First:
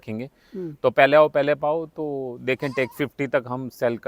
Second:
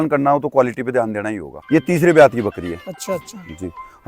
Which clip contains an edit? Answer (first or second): second